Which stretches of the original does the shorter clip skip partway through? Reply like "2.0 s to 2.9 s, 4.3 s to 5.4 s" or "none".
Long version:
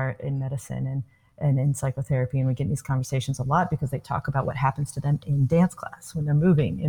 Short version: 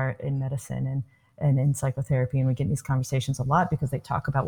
none